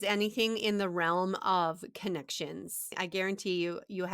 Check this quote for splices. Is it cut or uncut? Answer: cut